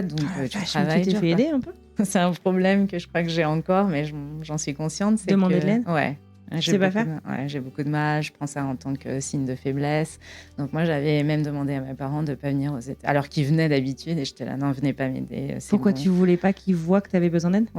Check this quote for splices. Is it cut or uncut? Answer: cut